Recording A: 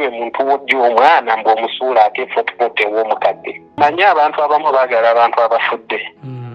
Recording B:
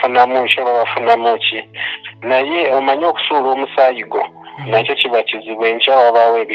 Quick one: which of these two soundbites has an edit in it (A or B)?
A